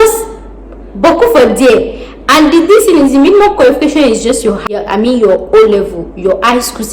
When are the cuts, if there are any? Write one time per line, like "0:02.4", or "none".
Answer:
0:04.6